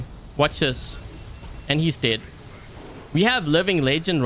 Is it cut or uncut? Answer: uncut